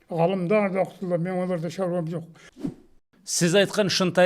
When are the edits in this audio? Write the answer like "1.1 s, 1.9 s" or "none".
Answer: 2.7 s